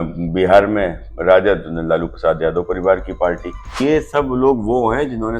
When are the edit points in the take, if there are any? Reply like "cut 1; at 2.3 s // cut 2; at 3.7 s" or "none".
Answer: cut 1; at 3.7 s